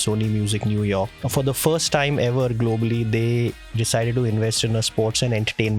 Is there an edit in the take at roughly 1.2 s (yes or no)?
yes